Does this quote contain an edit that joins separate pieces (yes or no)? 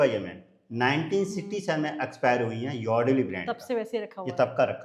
no